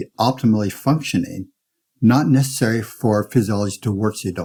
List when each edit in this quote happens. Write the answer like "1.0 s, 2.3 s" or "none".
none